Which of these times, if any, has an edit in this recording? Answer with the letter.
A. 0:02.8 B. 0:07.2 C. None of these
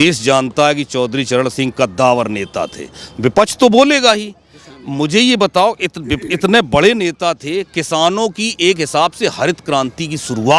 C